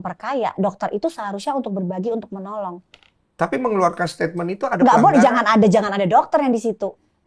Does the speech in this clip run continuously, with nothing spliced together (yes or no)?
yes